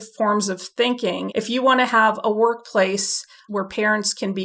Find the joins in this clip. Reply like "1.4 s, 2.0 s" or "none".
1.2 s, 3.4 s